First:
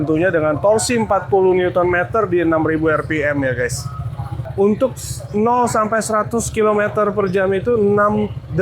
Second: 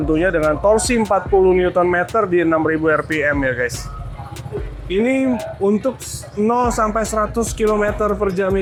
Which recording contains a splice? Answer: first; 1 cut; at 4.5 s

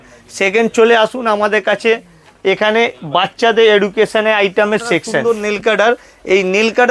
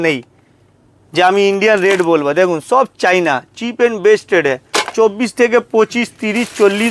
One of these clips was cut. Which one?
first; 1 cut; at 5.2 s

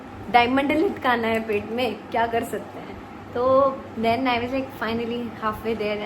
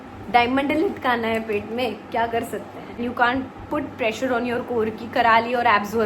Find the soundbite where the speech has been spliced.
second; 1 cut; at 2.9 s

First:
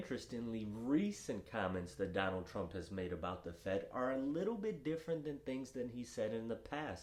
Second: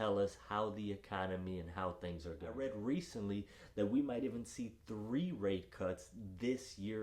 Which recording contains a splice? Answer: second; 1 cut; at 2.6 s

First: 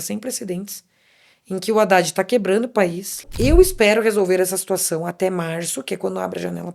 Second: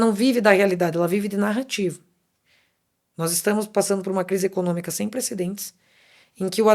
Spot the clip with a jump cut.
first; 1 cut; at 3.3 s

